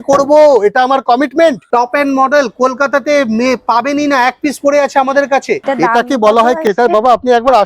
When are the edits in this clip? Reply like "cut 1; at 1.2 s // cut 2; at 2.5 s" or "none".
cut 1; at 1.6 s // cut 2; at 5.6 s